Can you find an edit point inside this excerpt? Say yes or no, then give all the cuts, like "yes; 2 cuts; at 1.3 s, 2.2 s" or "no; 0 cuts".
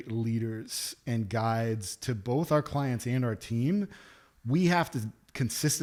no; 0 cuts